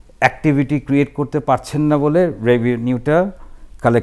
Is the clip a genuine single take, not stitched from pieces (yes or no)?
yes